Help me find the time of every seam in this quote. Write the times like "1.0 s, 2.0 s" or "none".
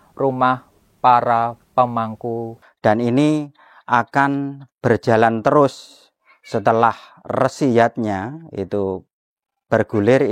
2.6 s